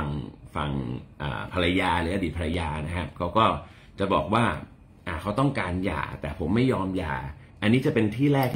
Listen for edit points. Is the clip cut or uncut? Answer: cut